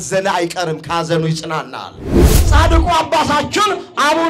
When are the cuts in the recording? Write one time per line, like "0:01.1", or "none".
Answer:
0:02.4